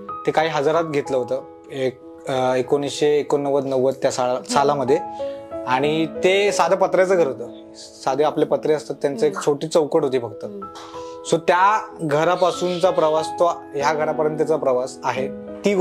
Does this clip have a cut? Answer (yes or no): no